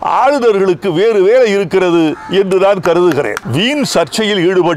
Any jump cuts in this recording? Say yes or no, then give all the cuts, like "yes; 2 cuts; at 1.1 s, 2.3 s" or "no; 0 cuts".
yes; 1 cut; at 3.4 s